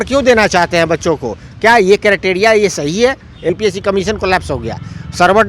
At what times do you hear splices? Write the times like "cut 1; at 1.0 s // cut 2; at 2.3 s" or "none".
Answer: cut 1; at 3.6 s